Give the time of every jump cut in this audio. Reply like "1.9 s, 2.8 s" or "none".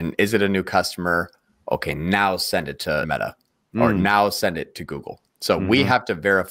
3.1 s